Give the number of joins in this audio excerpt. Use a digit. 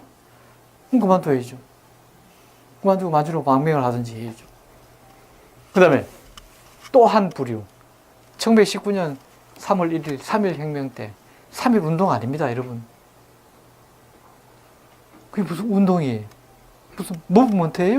1